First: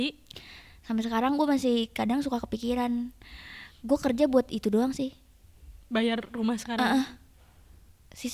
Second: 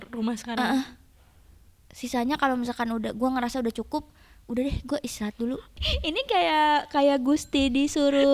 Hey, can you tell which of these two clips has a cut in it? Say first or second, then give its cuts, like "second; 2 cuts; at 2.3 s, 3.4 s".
second; 1 cut; at 5.7 s